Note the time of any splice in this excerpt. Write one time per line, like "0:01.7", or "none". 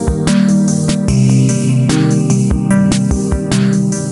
none